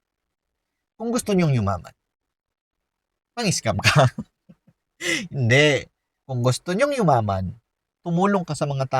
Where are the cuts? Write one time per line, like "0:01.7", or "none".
0:08.0